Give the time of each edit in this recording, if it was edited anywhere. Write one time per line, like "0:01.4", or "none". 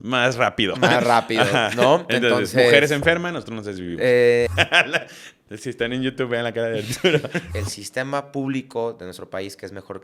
0:04.5
0:07.4